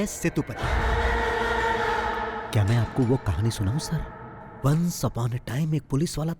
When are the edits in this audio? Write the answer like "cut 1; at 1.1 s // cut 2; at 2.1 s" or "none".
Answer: none